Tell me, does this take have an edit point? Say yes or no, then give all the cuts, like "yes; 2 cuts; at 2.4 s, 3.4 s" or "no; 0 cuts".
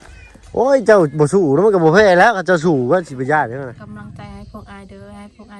yes; 1 cut; at 3.8 s